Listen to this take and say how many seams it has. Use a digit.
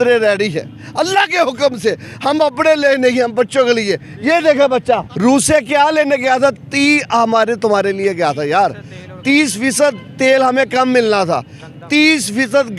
1